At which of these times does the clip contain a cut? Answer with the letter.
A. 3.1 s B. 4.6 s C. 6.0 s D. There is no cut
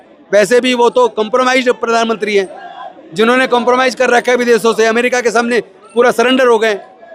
D